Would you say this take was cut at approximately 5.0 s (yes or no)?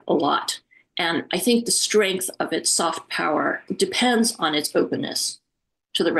no